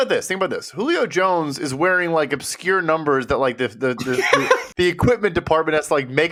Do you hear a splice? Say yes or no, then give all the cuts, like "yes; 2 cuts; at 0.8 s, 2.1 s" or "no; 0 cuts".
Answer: no; 0 cuts